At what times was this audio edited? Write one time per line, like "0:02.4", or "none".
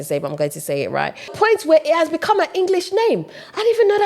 0:01.3